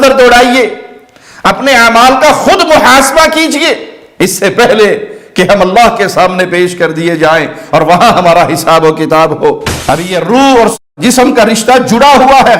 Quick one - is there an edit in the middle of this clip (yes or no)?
yes